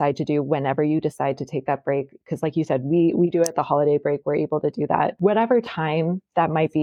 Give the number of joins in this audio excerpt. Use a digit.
1